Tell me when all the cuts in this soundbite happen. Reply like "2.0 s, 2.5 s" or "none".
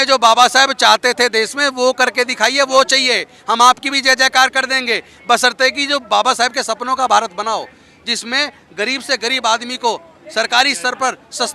none